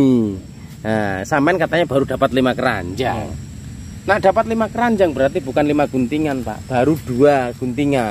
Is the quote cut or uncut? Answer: uncut